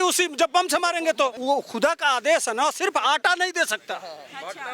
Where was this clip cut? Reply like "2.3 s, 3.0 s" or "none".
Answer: 1.4 s